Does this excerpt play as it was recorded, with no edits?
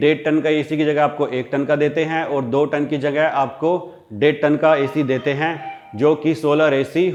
yes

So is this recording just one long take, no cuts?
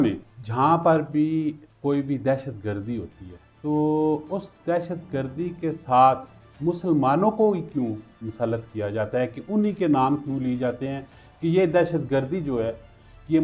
yes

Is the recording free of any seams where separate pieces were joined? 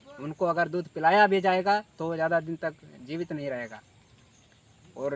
yes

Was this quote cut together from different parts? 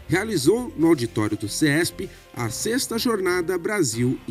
no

